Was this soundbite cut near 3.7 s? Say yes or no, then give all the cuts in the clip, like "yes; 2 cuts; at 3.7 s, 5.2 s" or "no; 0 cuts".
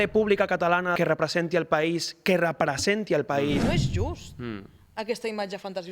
yes; 2 cuts; at 0.9 s, 3.7 s